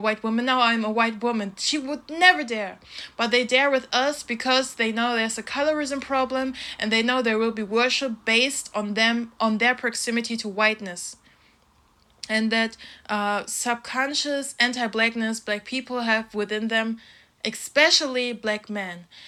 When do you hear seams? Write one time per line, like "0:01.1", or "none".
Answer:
none